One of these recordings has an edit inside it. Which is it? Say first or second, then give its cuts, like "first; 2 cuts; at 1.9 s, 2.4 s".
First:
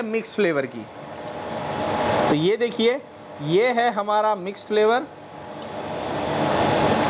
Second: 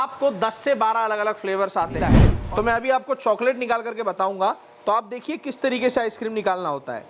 second; 1 cut; at 2.3 s